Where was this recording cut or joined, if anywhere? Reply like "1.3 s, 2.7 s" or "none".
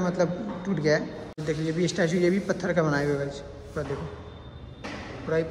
1.4 s